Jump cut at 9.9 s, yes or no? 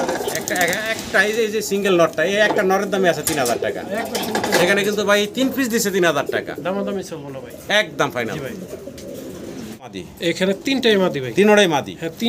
yes